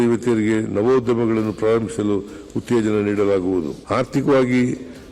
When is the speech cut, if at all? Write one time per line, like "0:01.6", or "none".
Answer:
0:03.8